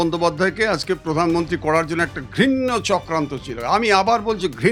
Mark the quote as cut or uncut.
uncut